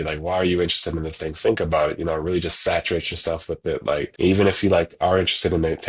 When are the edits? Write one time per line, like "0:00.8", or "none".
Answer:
0:04.1